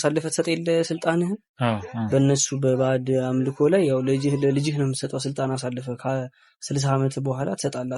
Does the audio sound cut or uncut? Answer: uncut